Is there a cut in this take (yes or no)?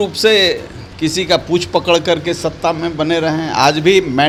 no